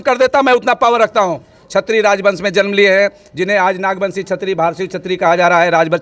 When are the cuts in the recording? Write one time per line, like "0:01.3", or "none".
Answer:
0:01.6